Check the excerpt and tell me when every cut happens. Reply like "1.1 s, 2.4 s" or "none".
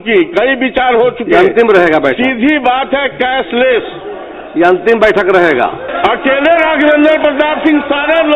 5.8 s